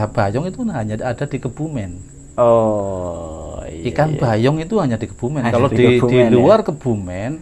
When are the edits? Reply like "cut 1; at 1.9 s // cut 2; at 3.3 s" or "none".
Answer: none